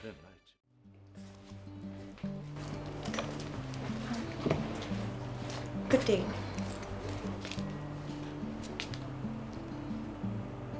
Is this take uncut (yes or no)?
no